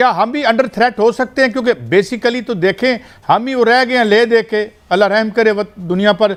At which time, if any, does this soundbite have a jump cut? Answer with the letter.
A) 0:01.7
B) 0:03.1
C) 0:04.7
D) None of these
D